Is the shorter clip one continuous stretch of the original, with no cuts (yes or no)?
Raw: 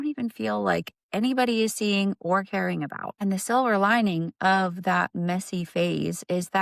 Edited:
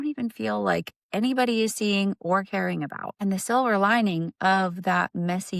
yes